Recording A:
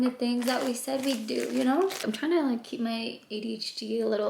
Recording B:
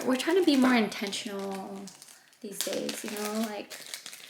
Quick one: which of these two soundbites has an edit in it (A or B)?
A